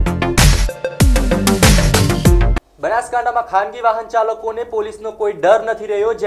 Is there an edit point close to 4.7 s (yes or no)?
no